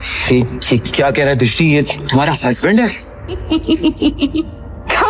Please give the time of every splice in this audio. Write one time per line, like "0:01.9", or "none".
0:03.4